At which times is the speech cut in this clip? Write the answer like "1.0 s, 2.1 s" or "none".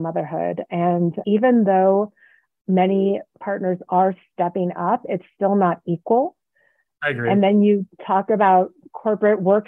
3.4 s